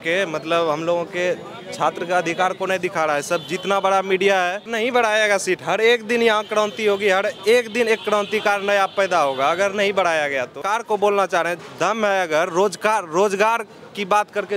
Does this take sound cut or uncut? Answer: cut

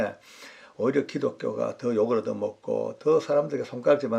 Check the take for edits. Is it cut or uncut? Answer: uncut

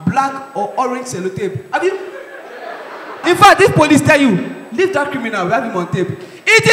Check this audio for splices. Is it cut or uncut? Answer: cut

